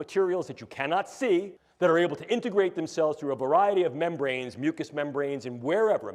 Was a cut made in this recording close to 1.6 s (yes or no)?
yes